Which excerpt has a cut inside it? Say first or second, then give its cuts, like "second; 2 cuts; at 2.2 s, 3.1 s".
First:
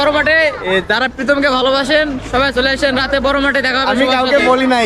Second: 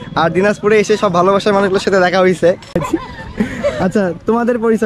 second; 1 cut; at 2.8 s